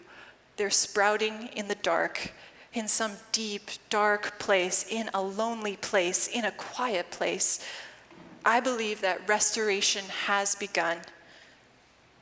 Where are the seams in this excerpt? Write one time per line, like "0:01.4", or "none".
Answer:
none

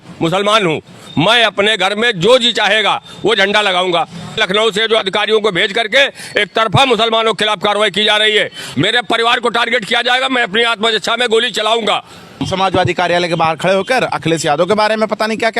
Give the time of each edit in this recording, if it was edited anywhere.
0:04.4
0:08.6
0:12.4

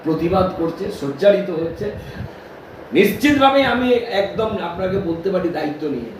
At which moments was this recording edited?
0:02.1

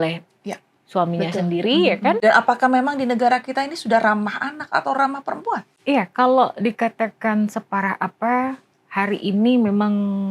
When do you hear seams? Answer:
0:02.2
0:05.7

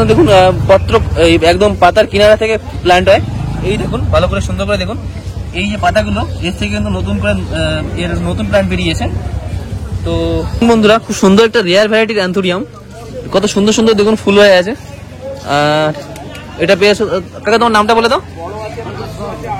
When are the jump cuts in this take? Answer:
0:10.5

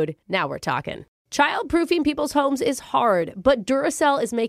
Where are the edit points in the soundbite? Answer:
0:01.0

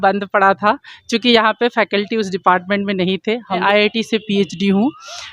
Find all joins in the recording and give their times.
0:03.6

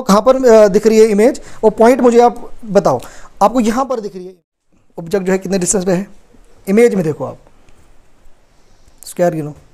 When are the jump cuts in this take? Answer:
0:04.9

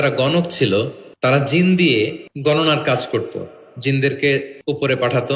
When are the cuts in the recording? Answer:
0:01.0
0:02.3
0:04.5

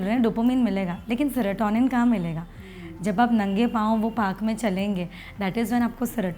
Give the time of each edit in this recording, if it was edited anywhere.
none

